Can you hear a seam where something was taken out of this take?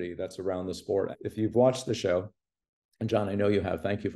yes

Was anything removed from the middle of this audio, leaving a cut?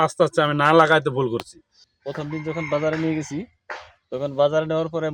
yes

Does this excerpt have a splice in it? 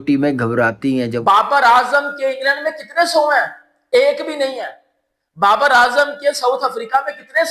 yes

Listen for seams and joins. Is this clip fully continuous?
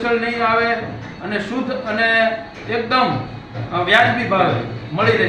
yes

